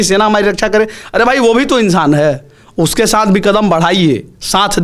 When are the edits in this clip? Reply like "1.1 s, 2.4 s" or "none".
none